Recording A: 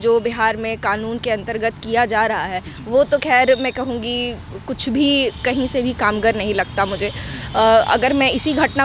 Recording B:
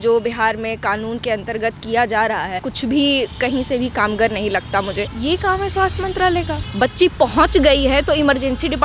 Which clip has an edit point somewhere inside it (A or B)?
B